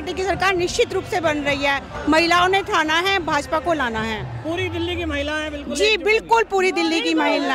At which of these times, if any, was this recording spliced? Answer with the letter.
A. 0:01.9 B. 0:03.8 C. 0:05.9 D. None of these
D